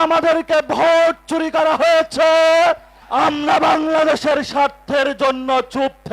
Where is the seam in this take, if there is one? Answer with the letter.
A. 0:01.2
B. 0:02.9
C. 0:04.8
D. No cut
B